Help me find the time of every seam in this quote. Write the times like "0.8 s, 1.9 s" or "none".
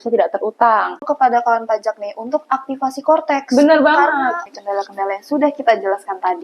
1.1 s, 4.5 s